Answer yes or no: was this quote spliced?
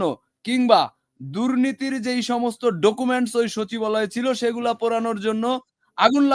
no